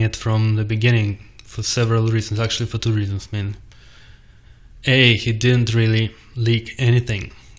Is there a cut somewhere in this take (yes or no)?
no